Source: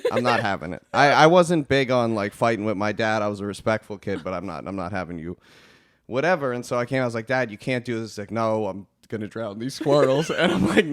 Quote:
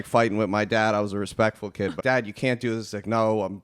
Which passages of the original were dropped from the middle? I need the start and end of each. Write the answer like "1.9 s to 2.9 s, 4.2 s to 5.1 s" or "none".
4.3 s to 7.2 s